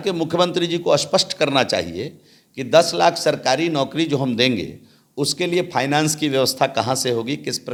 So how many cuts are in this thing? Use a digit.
0